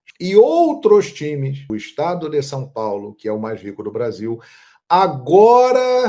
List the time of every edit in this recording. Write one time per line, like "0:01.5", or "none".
0:01.7